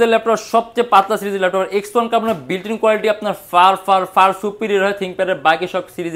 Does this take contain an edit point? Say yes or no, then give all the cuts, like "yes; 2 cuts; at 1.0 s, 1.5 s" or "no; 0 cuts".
no; 0 cuts